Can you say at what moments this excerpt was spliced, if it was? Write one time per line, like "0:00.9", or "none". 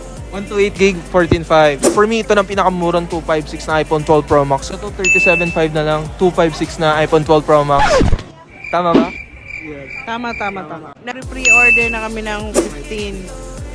0:01.8
0:10.9